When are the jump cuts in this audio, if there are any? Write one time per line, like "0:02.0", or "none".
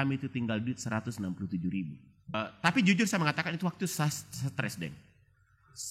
0:02.3

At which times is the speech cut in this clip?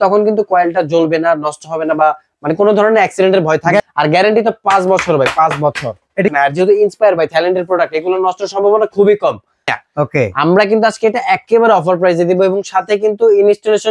0:03.8
0:06.3
0:09.7

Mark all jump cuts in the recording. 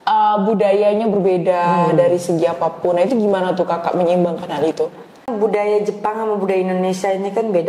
0:05.3

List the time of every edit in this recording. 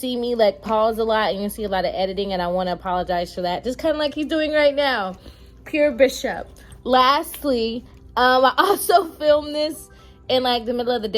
none

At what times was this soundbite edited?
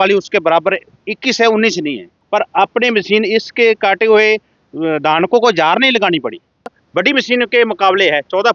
0:02.1
0:06.8

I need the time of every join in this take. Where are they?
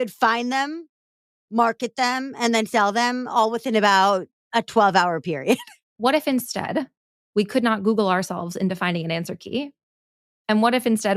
0:05.9

